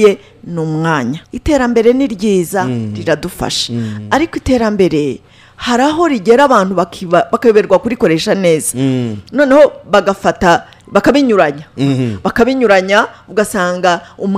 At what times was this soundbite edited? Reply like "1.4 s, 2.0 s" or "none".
1.3 s